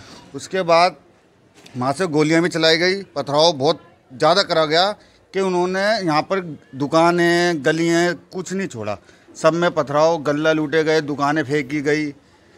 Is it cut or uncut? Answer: uncut